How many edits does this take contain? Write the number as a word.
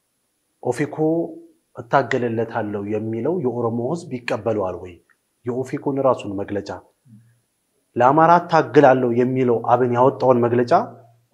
zero